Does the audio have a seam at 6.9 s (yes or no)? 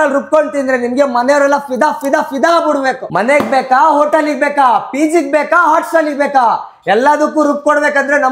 no